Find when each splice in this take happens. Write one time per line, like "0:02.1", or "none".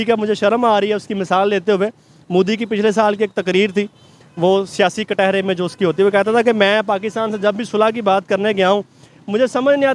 none